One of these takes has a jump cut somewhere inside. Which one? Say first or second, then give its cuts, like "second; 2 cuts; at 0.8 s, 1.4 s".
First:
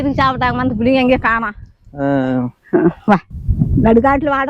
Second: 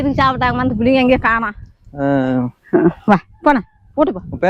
first; 1 cut; at 3.3 s